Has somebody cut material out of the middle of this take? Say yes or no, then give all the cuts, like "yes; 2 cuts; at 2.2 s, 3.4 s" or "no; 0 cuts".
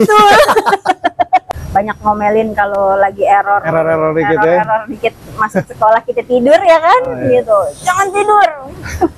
yes; 1 cut; at 1.4 s